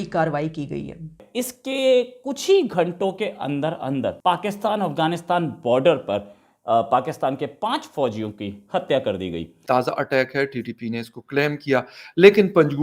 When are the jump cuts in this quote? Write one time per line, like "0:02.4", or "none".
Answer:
0:01.2
0:09.5

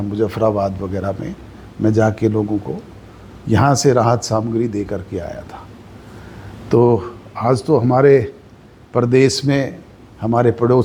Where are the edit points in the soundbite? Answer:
none

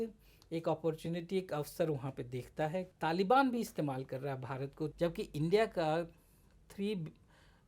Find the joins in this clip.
0:02.9
0:04.9

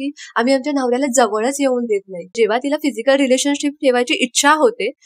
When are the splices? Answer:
0:02.3

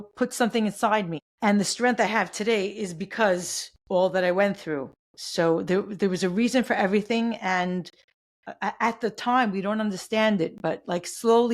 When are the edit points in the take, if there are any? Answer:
0:01.2

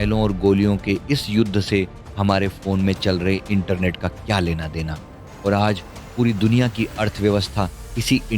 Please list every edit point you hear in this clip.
0:05.2

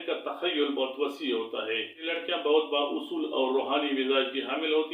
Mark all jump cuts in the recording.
0:02.2

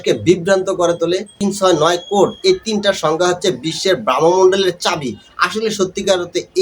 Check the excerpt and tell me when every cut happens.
0:01.3

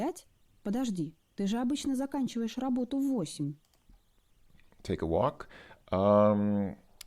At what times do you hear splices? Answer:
none

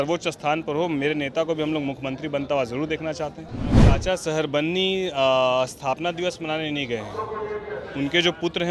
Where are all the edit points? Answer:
0:04.0

